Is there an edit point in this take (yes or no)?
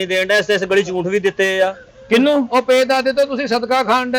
no